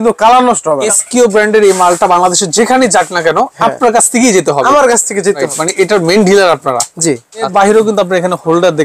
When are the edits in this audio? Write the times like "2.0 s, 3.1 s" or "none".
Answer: 0.8 s, 5.5 s, 7.5 s